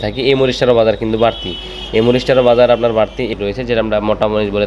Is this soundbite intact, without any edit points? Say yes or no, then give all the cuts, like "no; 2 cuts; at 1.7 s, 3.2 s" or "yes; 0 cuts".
no; 1 cut; at 3.3 s